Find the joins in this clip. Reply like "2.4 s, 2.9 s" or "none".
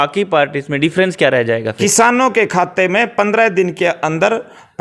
1.7 s